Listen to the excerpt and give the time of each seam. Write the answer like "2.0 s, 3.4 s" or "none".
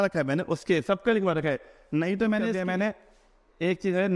2.6 s